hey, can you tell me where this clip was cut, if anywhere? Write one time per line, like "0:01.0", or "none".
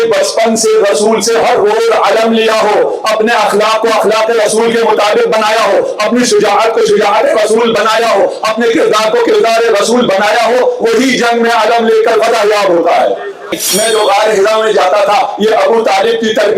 0:13.5